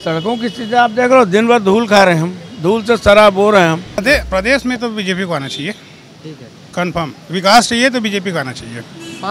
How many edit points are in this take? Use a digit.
1